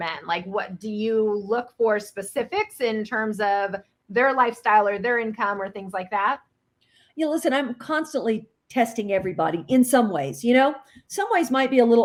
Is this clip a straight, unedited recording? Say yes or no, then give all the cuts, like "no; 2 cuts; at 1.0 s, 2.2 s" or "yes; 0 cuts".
yes; 0 cuts